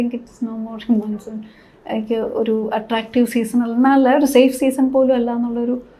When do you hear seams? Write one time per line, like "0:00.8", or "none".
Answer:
none